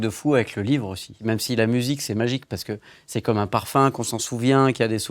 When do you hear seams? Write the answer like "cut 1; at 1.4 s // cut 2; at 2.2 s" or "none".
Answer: cut 1; at 1.2 s